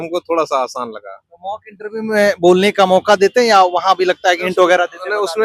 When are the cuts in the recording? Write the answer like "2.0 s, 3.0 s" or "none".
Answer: none